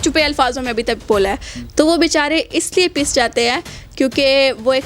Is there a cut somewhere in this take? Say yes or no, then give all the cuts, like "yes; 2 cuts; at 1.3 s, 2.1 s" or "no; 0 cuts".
yes; 1 cut; at 1.6 s